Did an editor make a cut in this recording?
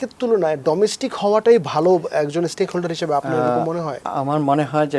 no; 0 cuts

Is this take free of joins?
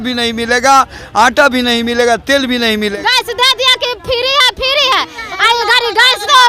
no; 1 cut; at 3.0 s

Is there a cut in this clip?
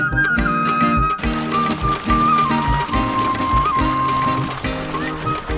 no; 0 cuts

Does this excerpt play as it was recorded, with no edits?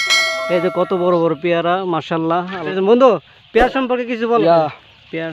no; 2 cuts; at 2.7 s, 4.4 s

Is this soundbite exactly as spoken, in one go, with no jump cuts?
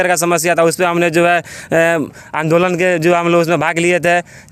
yes; 0 cuts

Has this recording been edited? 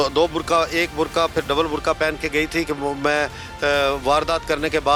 no; 0 cuts

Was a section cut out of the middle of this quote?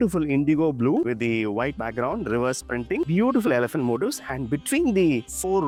no; 0 cuts

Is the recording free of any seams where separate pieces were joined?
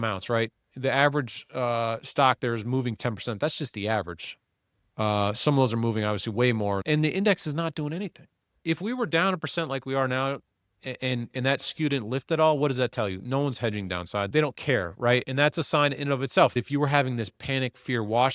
no; 3 cuts; at 6.8 s, 8.6 s, 16.5 s

